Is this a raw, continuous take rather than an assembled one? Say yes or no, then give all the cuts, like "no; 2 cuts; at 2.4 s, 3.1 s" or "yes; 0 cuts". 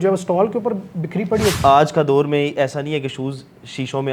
no; 1 cut; at 1.6 s